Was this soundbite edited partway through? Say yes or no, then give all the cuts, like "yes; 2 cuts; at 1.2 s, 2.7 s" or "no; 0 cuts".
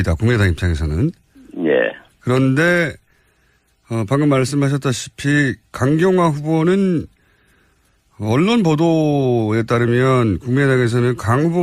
yes; 1 cut; at 9.2 s